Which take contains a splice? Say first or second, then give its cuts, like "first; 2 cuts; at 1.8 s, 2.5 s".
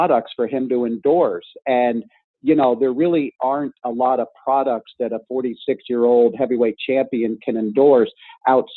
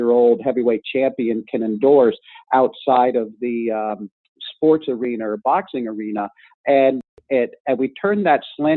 second; 1 cut; at 7.2 s